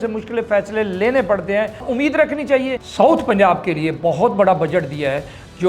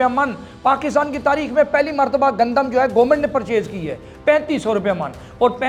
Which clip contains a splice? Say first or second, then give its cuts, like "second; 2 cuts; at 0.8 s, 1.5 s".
first; 2 cuts; at 1.8 s, 2.8 s